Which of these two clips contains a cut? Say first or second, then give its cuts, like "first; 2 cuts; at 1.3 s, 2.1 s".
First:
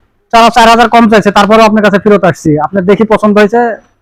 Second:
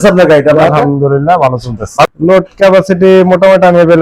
second; 1 cut; at 2.1 s